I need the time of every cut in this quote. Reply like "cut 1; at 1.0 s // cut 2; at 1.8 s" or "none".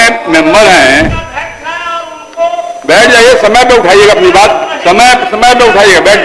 cut 1; at 1.3 s